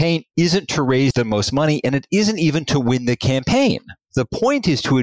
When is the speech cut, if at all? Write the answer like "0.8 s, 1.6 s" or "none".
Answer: 1.1 s